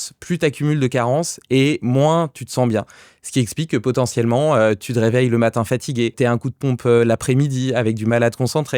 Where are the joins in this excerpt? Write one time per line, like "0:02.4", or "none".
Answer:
0:06.1